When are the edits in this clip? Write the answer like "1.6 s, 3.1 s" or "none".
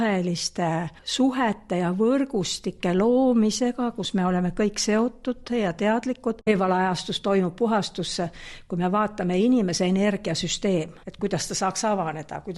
1.0 s, 6.5 s, 11.0 s